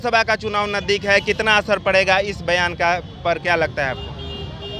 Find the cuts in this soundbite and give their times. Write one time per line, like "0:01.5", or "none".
none

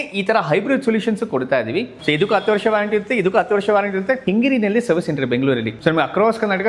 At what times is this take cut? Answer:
0:01.9
0:04.2
0:05.7

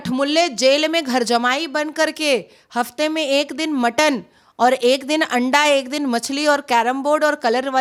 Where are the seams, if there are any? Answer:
none

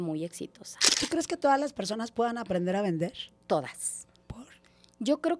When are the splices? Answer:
0:01.0
0:03.3

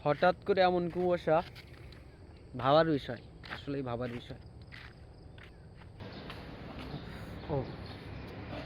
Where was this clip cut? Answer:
0:06.0

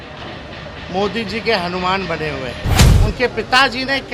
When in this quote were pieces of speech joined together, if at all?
0:02.8

